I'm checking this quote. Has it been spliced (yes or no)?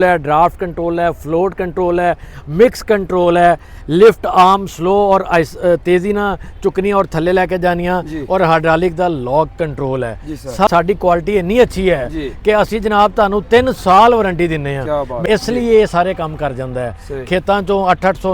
yes